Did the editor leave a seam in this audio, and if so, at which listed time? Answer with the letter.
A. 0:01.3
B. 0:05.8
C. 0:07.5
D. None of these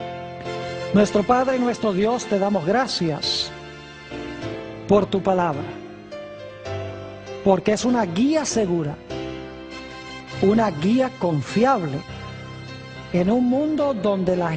D